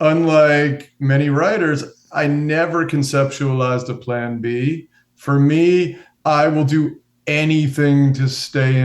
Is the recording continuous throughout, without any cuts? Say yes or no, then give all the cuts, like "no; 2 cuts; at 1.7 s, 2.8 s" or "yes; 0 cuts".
no; 1 cut; at 6.1 s